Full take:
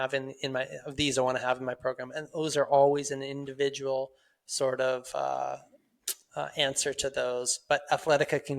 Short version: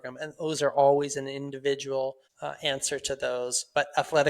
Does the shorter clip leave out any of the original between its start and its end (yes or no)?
yes